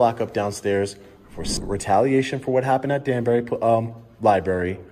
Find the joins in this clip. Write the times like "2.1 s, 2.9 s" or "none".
1.5 s